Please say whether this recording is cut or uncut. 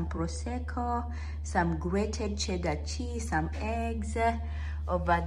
uncut